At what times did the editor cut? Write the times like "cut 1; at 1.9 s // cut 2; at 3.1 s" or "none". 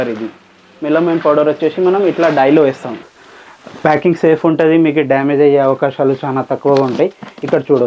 cut 1; at 2.9 s